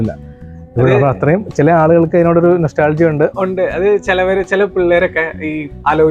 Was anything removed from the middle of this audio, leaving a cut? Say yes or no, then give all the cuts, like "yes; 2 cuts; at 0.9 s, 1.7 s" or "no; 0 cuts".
no; 0 cuts